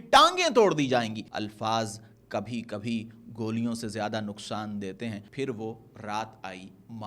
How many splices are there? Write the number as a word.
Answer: two